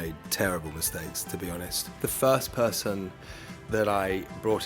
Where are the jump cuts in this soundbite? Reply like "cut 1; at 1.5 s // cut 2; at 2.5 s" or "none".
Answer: cut 1; at 1.8 s